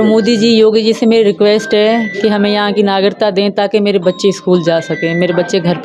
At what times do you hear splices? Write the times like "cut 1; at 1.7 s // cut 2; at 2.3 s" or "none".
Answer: none